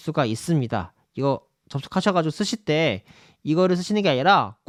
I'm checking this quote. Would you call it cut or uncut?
uncut